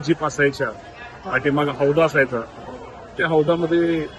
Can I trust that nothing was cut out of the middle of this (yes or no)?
yes